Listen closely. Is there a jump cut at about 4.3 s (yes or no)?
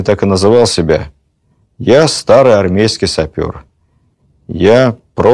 no